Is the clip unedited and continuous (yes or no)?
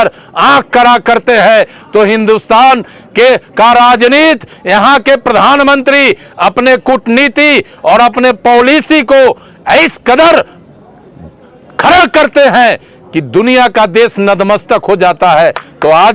yes